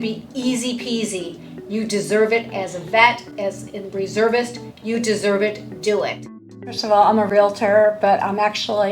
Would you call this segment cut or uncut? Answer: cut